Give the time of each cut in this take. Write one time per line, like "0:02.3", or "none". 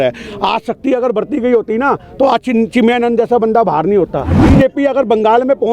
0:04.4

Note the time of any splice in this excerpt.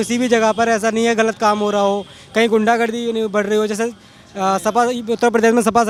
none

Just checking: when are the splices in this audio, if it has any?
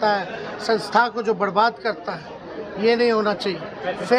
none

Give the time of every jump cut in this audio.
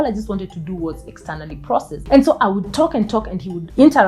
0:02.0

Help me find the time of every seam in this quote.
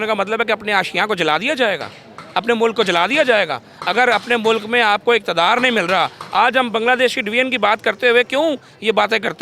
none

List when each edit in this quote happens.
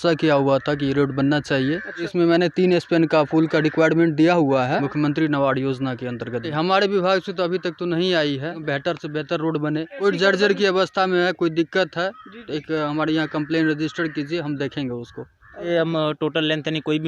0:02.1
0:04.8
0:06.5
0:08.6
0:10.0
0:15.7

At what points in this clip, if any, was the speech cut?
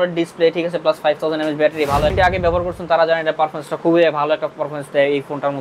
0:02.1

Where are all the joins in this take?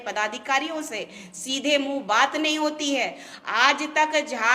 none

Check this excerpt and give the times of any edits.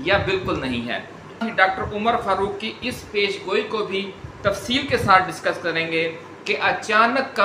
0:01.4

